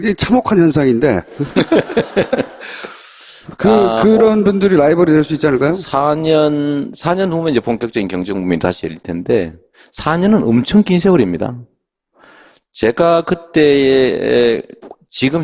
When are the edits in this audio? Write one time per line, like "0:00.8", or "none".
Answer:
0:14.3